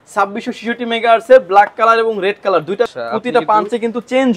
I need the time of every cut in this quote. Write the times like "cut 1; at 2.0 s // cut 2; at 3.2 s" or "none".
cut 1; at 2.9 s